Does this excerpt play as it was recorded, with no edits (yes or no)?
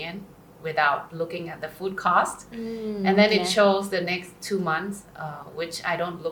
yes